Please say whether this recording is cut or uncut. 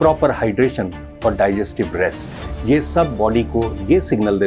uncut